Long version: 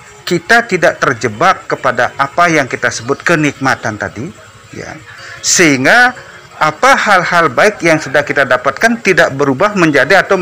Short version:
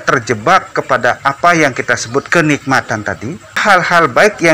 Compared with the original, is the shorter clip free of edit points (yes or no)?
no